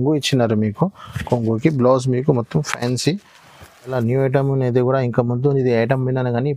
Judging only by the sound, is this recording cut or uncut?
cut